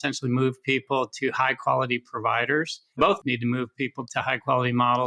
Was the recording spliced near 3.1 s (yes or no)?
yes